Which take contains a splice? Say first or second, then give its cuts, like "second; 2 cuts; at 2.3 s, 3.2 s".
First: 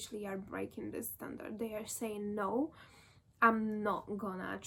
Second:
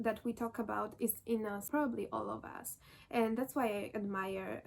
second; 1 cut; at 1.6 s